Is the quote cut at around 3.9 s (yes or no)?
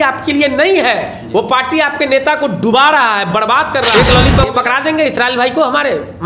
yes